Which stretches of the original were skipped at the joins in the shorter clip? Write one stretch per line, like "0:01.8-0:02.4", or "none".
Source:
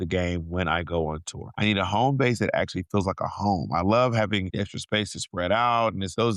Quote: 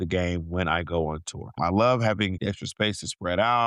0:01.5-0:03.6